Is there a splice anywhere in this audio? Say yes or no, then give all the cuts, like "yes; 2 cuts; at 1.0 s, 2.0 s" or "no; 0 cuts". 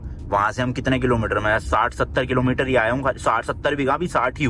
no; 0 cuts